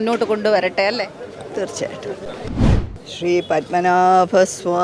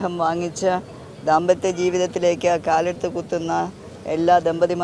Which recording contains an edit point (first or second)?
first